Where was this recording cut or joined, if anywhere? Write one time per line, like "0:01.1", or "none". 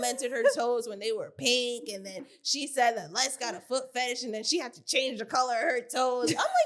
none

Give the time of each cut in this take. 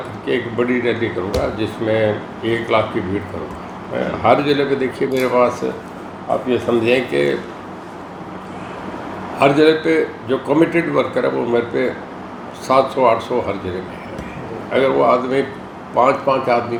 none

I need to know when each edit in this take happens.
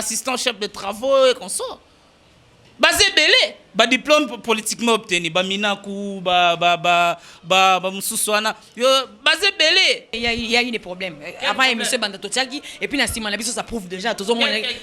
0:10.1

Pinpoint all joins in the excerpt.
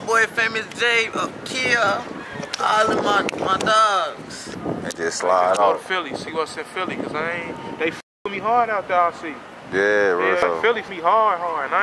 0:04.3
0:10.6

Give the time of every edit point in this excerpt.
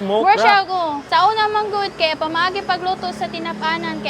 0:01.0

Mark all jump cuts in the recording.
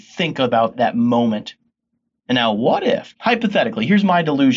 0:03.1

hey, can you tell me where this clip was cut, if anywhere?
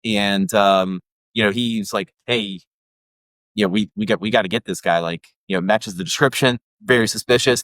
0:06.7

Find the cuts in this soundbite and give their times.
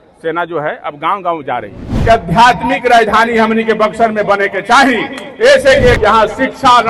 0:01.9
0:06.0

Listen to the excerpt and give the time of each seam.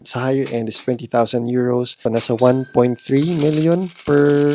none

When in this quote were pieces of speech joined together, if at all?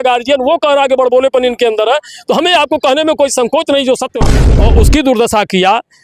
0:04.6

